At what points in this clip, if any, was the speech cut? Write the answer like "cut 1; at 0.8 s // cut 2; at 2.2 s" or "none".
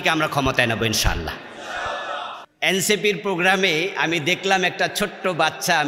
cut 1; at 2.4 s